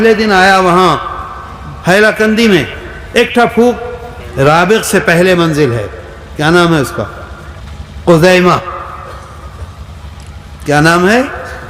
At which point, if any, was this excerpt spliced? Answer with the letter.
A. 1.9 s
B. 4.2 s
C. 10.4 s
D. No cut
B